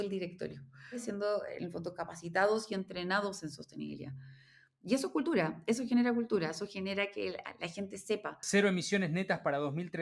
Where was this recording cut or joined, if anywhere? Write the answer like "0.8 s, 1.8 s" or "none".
1.0 s, 8.4 s